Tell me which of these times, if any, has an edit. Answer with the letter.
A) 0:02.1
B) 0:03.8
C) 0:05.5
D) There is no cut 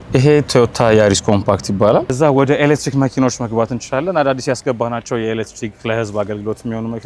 A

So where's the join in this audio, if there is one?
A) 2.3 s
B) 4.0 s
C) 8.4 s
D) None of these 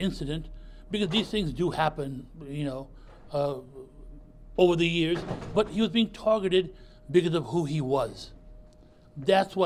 D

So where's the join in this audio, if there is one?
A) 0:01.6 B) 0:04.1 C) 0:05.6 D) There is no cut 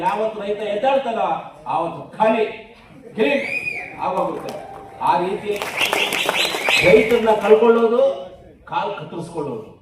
C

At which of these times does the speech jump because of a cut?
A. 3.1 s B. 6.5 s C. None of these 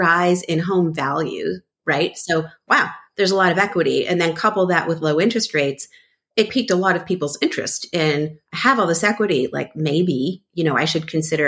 B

